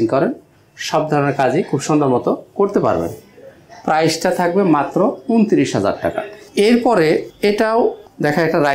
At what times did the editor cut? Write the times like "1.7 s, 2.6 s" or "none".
none